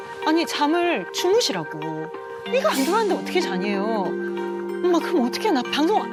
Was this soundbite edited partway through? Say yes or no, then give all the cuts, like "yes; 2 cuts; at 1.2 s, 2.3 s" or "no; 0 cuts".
no; 0 cuts